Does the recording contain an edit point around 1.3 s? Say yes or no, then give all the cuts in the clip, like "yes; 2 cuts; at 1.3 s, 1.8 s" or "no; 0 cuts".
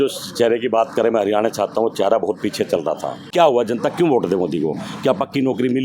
no; 1 cut; at 3.3 s